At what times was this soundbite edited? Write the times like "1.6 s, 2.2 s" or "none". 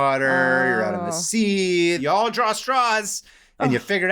2.0 s